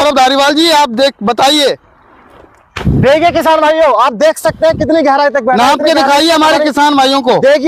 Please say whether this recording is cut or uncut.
uncut